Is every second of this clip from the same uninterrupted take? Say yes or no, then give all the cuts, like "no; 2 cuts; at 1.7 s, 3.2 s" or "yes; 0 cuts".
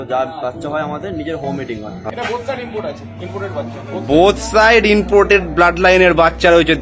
no; 1 cut; at 2.0 s